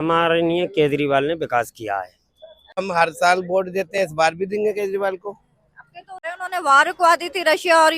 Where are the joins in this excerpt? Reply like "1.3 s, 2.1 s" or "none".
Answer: 2.8 s, 6.2 s